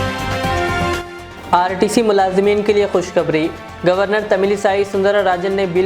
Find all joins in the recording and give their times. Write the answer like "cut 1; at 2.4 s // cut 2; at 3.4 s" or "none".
none